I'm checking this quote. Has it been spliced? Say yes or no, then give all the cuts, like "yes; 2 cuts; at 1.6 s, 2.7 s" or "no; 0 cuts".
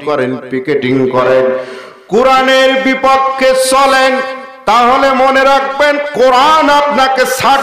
no; 0 cuts